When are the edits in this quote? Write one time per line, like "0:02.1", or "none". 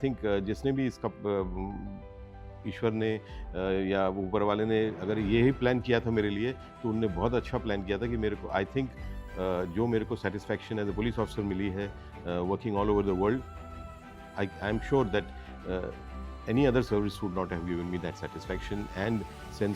none

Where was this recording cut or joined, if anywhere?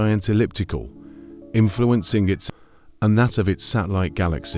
0:02.4

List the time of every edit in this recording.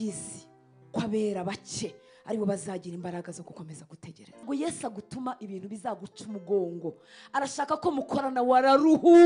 0:04.4

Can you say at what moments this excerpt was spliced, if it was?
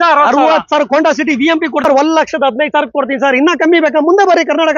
0:01.8

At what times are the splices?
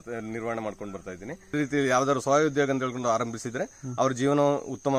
0:01.5

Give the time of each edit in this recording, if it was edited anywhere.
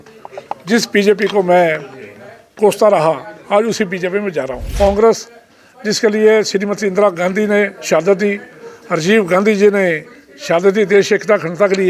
0:04.8

